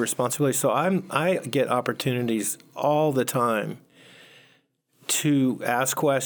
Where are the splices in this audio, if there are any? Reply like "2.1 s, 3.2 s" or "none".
none